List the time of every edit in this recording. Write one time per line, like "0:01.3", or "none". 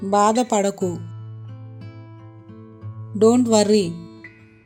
none

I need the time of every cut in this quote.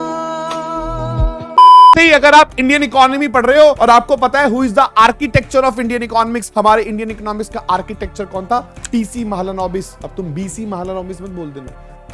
0:02.0
0:03.8
0:06.4
0:10.0

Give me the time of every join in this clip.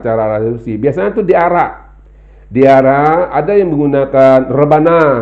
none

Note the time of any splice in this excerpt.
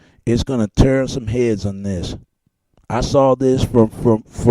0:01.0

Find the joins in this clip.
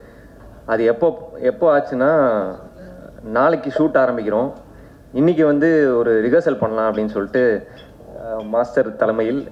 none

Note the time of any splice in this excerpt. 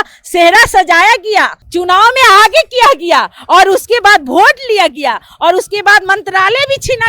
0:01.6

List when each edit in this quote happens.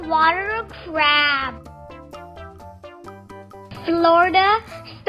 none

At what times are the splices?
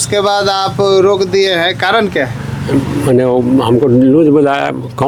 none

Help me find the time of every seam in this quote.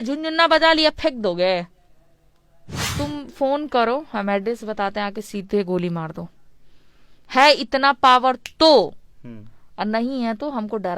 0:02.8

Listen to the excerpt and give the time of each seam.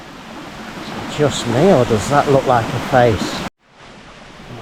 0:03.6

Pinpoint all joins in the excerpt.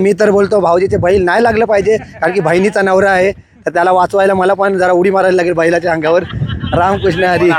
none

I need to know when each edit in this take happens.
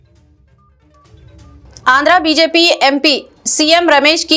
0:01.6

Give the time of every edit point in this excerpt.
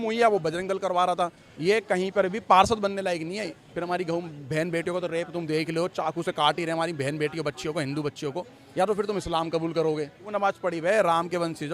0:01.5
0:03.7
0:08.5
0:10.2

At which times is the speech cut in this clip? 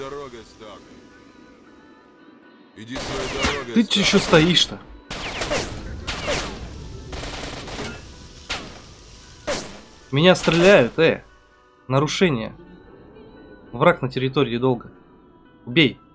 none

